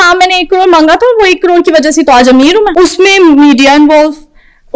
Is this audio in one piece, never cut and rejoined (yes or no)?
no